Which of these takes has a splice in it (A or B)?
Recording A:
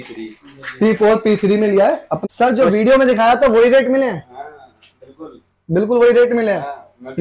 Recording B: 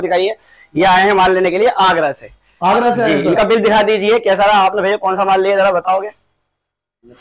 A